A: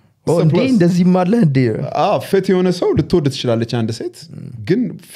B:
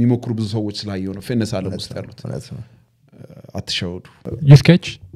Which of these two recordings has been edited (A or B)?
B